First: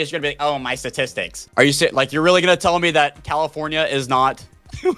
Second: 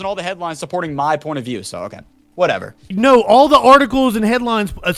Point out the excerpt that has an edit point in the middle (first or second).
first